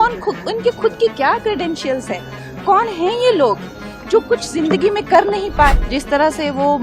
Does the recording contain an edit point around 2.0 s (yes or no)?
no